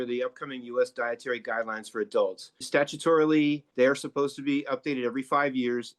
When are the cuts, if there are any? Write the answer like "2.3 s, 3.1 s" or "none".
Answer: 2.6 s, 3.7 s